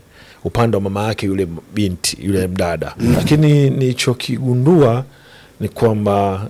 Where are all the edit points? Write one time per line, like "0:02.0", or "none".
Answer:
0:03.1